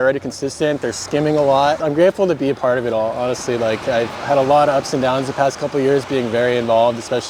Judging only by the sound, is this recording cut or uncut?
cut